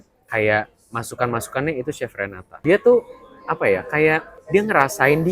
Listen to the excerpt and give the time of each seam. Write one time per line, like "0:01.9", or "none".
0:02.6
0:04.3